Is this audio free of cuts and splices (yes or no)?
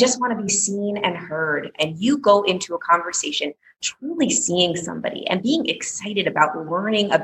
no